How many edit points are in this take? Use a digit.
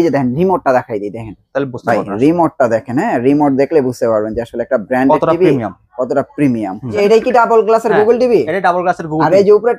1